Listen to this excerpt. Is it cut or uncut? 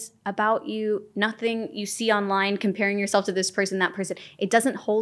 uncut